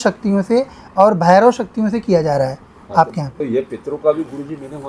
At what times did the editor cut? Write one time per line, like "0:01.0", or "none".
0:03.4